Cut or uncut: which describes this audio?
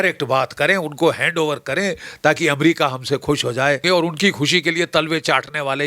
cut